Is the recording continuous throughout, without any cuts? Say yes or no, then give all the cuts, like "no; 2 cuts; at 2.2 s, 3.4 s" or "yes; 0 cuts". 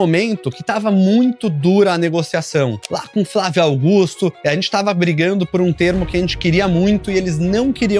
yes; 0 cuts